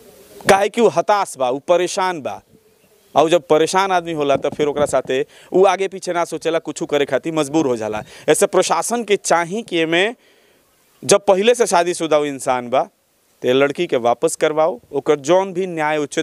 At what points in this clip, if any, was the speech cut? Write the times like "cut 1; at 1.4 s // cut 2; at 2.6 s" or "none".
none

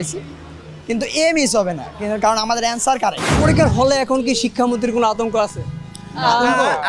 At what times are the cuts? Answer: cut 1; at 3.3 s

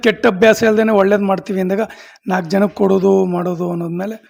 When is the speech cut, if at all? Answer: none

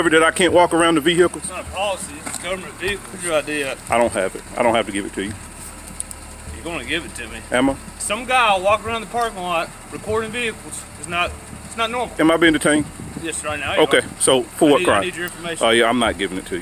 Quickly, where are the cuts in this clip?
cut 1; at 3.1 s // cut 2; at 8.0 s // cut 3; at 12.1 s

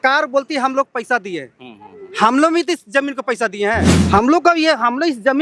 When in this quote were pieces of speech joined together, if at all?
cut 1; at 4.0 s

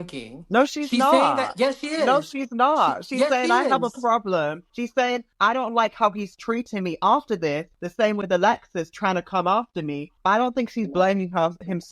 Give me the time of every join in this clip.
none

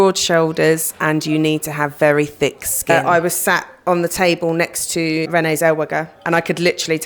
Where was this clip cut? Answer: cut 1; at 2.9 s // cut 2; at 5.3 s

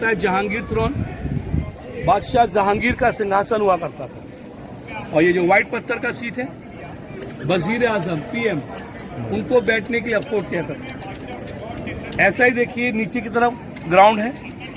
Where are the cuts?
none

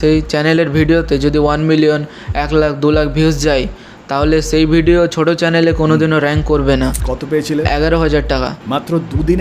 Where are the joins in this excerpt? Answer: cut 1; at 7.1 s

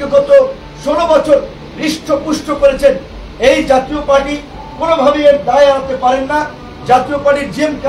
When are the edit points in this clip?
none

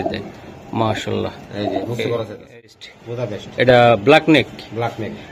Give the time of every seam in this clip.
cut 1; at 2.6 s

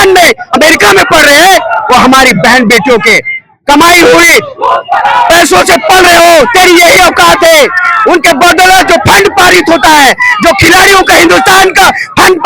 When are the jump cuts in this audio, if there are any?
none

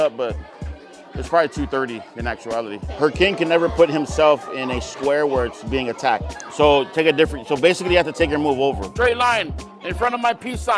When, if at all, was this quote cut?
cut 1; at 8.9 s

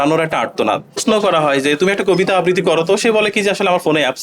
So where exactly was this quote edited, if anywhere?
cut 1; at 1.0 s

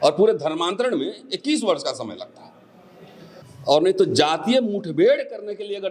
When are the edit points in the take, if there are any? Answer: cut 1; at 3.4 s

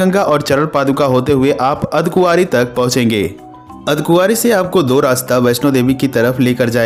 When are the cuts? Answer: none

